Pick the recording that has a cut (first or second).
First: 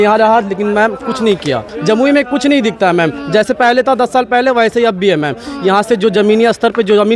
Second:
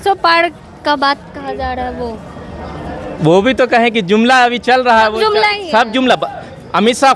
first